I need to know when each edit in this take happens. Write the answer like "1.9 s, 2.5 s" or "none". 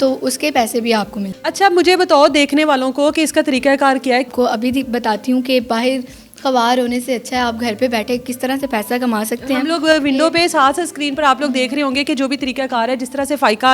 1.3 s, 4.3 s